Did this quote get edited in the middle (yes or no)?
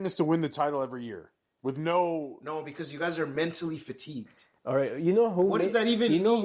no